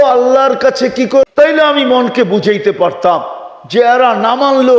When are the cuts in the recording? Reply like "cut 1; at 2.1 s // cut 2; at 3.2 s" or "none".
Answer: cut 1; at 1.3 s